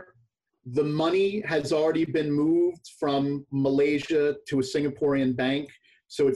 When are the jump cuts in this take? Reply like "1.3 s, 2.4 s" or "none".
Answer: none